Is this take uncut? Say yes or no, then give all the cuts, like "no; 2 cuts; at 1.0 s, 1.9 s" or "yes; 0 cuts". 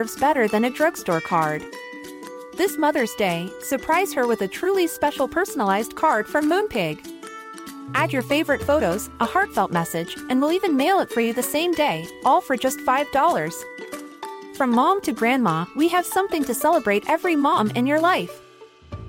yes; 0 cuts